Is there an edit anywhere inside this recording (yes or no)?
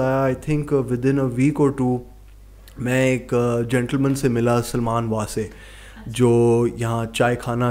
no